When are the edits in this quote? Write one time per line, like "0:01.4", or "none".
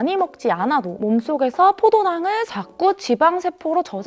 0:02.6